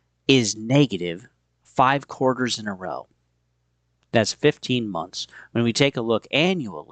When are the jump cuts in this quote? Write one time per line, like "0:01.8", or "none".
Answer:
none